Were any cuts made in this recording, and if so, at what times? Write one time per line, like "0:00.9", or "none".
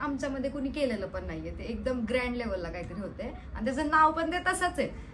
none